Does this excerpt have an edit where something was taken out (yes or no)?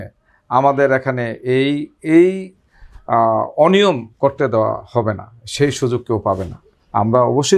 no